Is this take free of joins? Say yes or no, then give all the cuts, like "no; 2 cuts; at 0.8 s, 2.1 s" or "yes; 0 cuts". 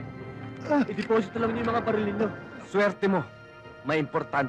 no; 1 cut; at 2.5 s